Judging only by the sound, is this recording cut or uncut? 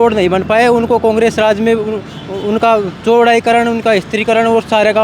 uncut